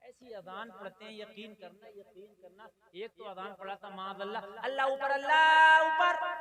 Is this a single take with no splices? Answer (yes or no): yes